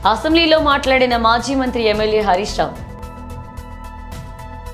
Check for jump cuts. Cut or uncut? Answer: cut